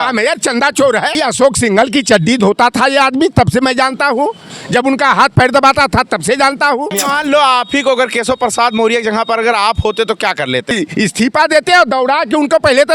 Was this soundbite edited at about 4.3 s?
no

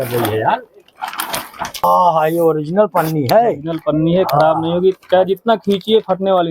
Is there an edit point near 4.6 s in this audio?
no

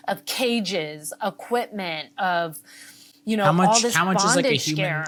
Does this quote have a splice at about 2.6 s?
no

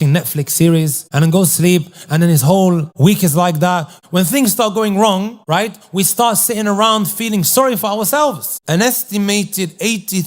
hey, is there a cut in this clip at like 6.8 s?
no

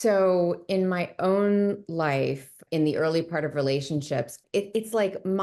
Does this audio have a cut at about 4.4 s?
yes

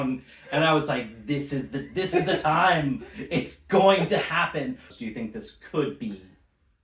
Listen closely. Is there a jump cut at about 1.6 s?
no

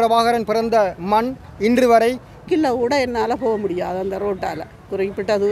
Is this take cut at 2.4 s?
yes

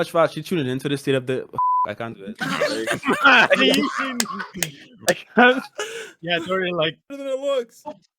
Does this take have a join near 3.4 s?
no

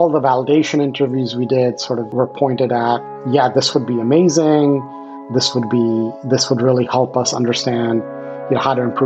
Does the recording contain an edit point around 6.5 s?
no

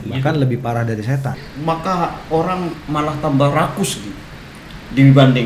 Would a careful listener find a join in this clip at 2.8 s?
no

